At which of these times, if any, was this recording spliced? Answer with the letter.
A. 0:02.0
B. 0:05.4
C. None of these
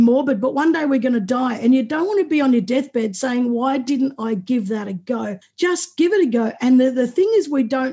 B